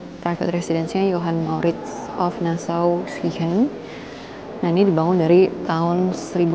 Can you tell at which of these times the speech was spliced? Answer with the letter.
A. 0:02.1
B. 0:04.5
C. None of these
C